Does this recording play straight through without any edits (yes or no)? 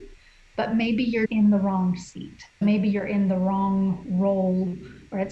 no